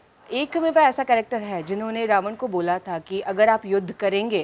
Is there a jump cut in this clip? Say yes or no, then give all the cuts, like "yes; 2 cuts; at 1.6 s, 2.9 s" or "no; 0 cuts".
no; 0 cuts